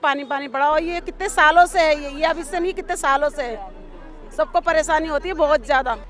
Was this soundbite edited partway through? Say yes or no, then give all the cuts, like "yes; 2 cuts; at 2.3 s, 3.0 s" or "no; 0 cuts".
no; 0 cuts